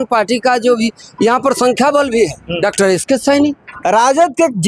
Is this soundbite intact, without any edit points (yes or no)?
no